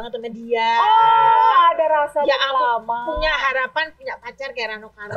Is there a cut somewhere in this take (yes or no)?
no